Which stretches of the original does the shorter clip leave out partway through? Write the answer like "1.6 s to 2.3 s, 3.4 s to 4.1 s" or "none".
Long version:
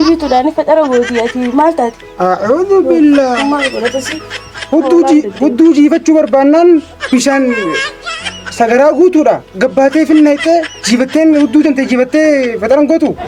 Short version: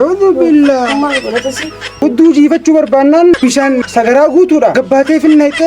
4.4 s to 5.3 s, 6.9 s to 8.1 s, 9.4 s to 9.6 s